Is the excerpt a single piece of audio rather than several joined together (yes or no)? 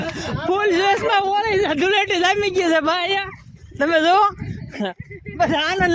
yes